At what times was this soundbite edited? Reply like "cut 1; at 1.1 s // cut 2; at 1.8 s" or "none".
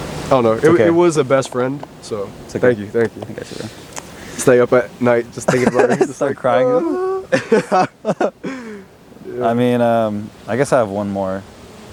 none